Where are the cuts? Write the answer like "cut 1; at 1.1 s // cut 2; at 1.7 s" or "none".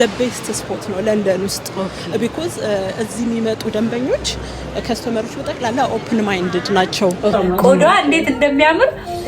cut 1; at 7.3 s

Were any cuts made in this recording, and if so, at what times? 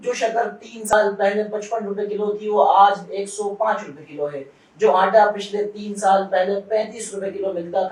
cut 1; at 0.9 s

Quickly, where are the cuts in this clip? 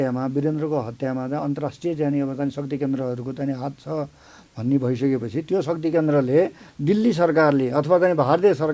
cut 1; at 6.7 s

